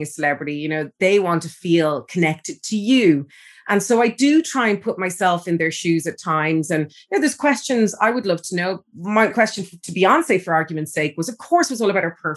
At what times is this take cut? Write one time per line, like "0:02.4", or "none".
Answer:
0:00.9
0:09.3